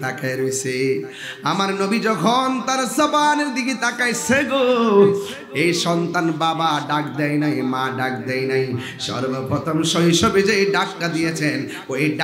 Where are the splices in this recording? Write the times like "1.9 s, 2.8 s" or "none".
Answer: none